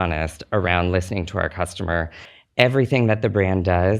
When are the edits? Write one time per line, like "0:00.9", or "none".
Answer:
0:02.2